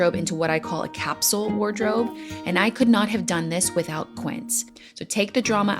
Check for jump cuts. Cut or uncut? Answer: cut